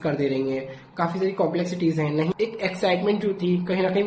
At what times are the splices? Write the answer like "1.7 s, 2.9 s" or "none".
2.3 s